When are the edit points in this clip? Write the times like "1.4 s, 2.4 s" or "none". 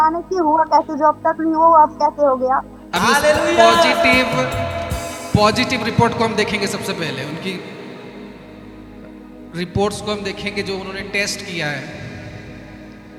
none